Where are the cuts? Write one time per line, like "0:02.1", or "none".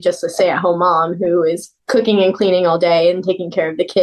none